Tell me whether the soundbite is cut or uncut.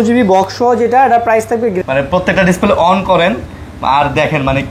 cut